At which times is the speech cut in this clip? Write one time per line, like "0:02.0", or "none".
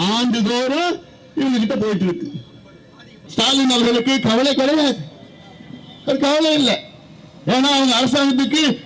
0:03.2